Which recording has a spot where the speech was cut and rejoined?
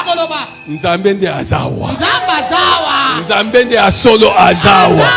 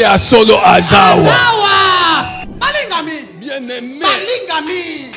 second; 1 cut; at 2.4 s

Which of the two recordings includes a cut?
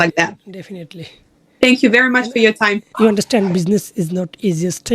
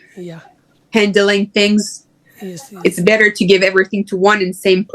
first; 1 cut; at 2.8 s

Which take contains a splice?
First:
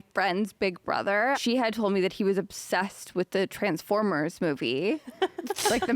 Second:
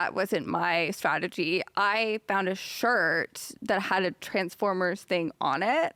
first; 1 cut; at 1.4 s

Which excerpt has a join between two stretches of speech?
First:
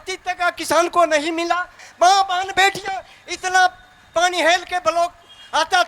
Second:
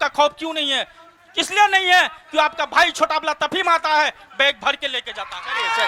first; 1 cut; at 1.8 s

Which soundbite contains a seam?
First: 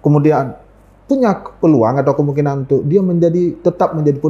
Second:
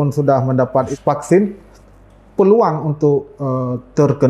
second; 1 cut; at 0.9 s

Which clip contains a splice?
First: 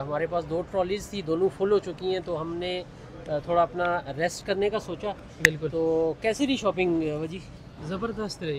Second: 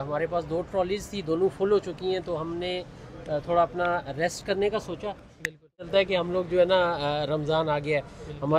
second; 1 cut; at 5.8 s

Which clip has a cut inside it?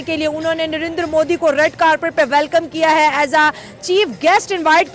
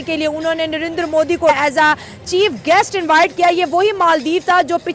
second; 1 cut; at 1.5 s

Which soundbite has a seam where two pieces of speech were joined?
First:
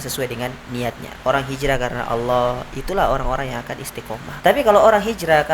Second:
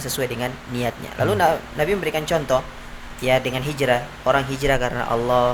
first; 2 cuts; at 1.1 s, 4.2 s

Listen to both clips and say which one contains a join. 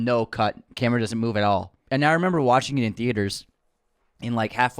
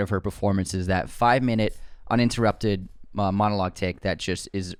first; 1 cut; at 1.8 s

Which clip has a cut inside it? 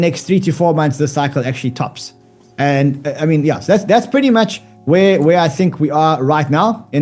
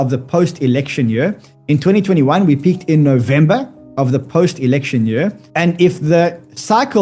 second; 1 cut; at 5.4 s

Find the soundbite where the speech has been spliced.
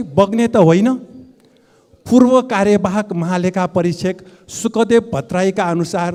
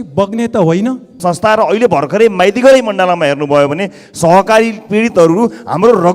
second; 1 cut; at 1.1 s

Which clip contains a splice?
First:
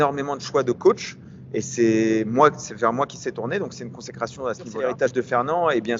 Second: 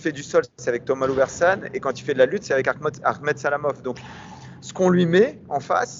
first; 1 cut; at 4.8 s

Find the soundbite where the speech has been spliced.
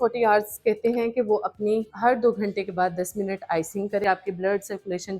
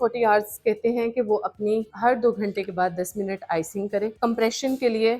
first; 1 cut; at 4.0 s

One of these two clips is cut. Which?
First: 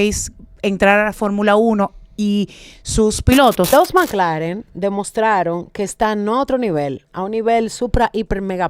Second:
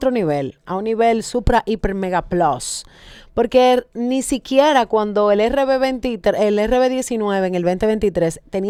first; 1 cut; at 3.7 s

